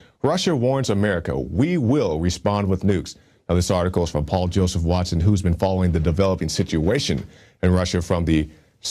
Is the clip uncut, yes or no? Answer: no